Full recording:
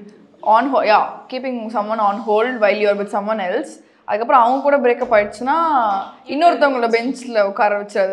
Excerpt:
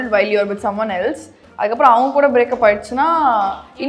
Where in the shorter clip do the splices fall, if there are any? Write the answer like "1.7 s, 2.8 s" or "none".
none